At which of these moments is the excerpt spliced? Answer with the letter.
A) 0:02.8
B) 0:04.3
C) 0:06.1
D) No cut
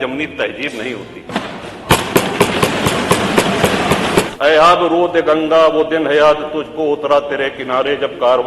B